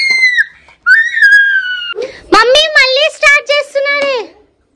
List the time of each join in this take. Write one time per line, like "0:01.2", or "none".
0:02.0